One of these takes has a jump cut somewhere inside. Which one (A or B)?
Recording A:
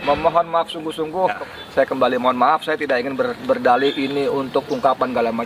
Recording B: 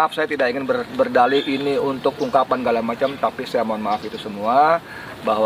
A